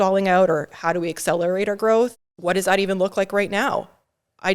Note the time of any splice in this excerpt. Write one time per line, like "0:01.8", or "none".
0:02.1